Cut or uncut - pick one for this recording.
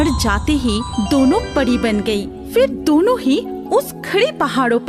uncut